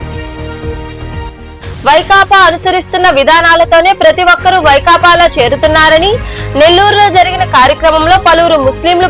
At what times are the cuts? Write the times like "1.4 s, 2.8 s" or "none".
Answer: 1.3 s